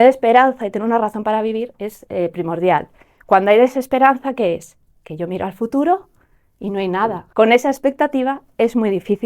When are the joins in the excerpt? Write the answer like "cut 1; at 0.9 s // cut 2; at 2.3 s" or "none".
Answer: cut 1; at 7.2 s